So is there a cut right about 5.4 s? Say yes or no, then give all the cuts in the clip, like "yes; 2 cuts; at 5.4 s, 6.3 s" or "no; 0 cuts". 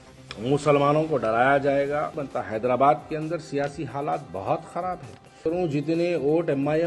yes; 2 cuts; at 2.2 s, 5.4 s